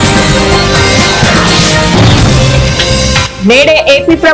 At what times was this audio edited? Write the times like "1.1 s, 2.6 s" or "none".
3.2 s